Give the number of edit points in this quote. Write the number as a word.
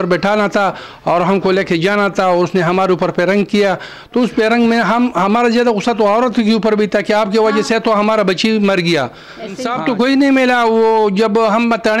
one